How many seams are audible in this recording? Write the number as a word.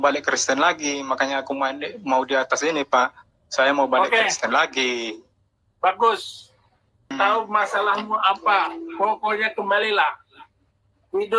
one